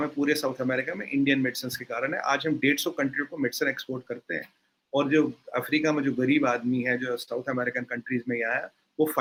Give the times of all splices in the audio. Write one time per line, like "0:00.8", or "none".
none